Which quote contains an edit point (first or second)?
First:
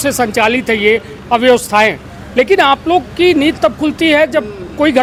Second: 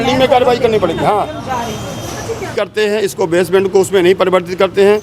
second